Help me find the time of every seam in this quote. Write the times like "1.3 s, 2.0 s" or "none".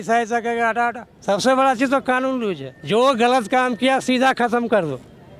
1.1 s, 2.7 s